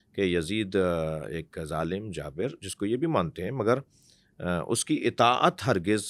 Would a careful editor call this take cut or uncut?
uncut